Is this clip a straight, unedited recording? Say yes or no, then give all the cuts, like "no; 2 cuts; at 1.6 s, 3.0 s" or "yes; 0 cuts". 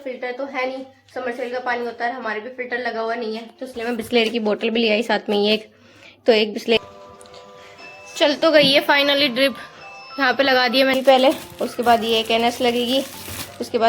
no; 2 cuts; at 6.8 s, 10.9 s